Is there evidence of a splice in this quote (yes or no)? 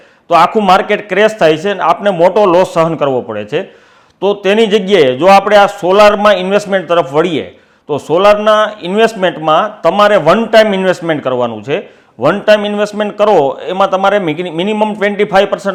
no